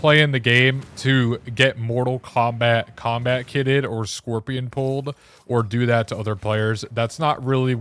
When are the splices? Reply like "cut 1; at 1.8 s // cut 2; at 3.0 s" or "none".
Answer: none

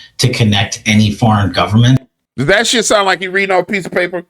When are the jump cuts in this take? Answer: cut 1; at 2.2 s

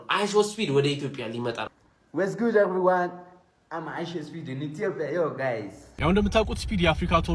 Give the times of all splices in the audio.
cut 1; at 1.7 s // cut 2; at 6.0 s

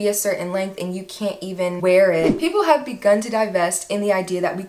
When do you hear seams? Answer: cut 1; at 2.3 s

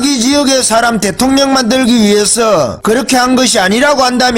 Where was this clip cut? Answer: cut 1; at 2.8 s

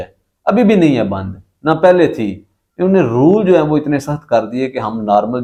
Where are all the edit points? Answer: none

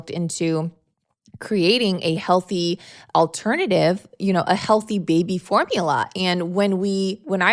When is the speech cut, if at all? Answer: none

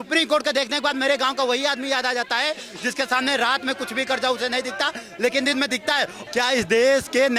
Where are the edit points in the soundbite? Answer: cut 1; at 6.1 s

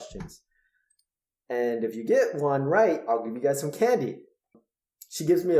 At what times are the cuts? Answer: cut 1; at 4.5 s

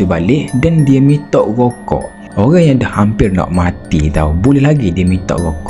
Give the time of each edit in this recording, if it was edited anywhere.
cut 1; at 2.2 s

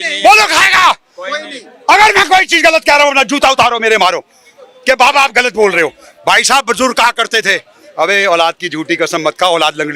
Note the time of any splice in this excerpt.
none

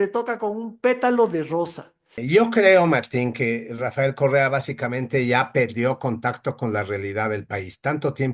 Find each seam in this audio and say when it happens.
cut 1; at 2.1 s

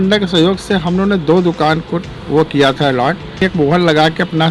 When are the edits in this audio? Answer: cut 1; at 3.4 s

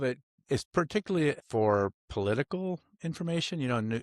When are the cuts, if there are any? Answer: cut 1; at 1.4 s

